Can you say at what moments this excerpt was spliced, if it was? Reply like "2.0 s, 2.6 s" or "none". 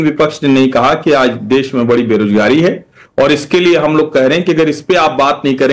none